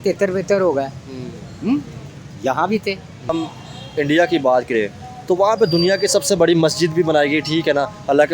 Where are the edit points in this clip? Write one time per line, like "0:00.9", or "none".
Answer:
0:03.3